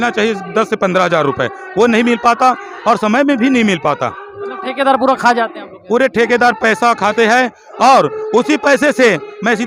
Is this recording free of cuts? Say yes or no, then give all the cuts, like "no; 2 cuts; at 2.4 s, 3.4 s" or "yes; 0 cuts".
yes; 0 cuts